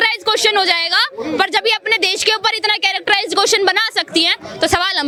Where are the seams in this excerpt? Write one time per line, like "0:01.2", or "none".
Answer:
none